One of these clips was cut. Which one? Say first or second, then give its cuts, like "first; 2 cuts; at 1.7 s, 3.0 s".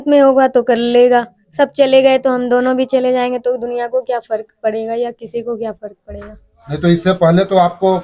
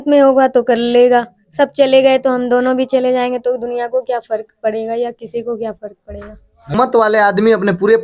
second; 1 cut; at 6.7 s